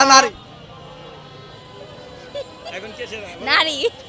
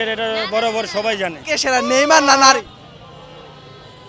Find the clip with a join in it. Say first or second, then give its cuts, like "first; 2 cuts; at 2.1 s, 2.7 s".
second; 1 cut; at 1.4 s